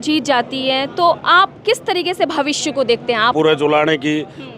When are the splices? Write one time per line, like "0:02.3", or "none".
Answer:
0:03.3